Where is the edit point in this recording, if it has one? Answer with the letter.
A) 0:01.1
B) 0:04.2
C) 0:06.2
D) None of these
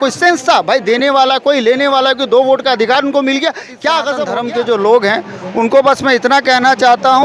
B